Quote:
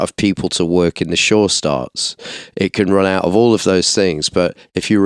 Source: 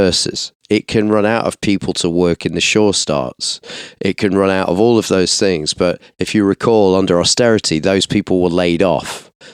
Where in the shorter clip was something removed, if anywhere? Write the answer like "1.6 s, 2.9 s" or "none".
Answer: none